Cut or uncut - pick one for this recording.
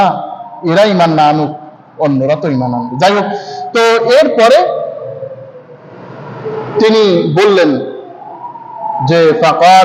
uncut